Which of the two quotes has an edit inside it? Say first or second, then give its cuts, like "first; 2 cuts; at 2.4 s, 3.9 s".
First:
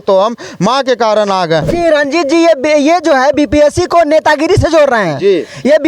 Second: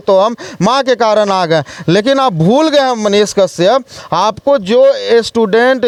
first; 1 cut; at 1.7 s